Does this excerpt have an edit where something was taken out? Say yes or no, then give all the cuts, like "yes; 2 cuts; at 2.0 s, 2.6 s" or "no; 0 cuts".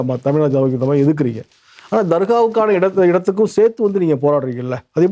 no; 0 cuts